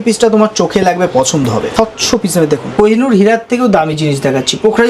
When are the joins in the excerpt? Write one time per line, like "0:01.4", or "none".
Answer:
0:01.7
0:02.7